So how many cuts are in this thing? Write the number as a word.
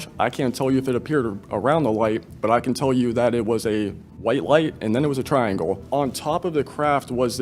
two